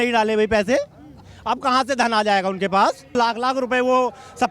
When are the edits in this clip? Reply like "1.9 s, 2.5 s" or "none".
3.1 s